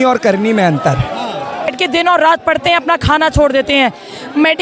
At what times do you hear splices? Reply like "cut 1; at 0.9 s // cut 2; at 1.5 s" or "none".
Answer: cut 1; at 1.7 s